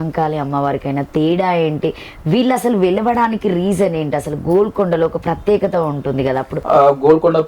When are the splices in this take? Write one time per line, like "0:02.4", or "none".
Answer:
0:06.5